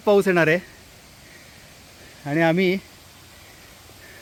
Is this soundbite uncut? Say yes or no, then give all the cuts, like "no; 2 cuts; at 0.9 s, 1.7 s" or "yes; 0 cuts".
yes; 0 cuts